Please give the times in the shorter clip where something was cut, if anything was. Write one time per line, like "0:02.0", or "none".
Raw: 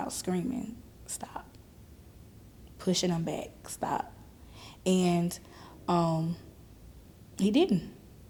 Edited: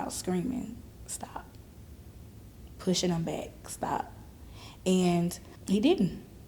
0:05.5